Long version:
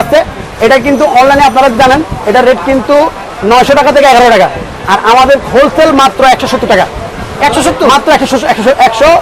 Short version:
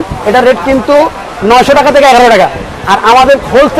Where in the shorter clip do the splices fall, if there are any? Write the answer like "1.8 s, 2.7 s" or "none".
none